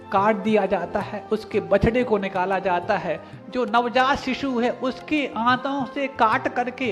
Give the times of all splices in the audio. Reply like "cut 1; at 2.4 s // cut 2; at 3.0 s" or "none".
none